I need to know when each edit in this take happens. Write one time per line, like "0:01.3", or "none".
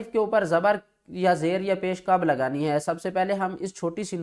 none

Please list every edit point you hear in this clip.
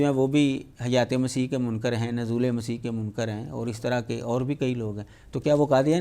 none

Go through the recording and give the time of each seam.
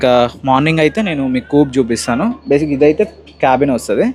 none

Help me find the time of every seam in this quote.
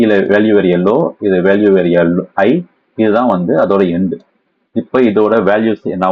none

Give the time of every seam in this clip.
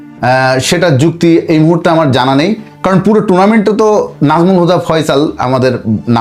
none

